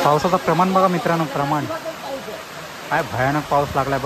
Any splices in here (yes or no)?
no